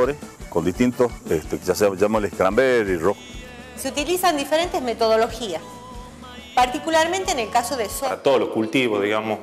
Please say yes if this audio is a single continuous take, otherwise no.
no